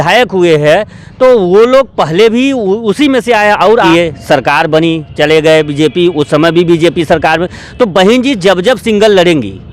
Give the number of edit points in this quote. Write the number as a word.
one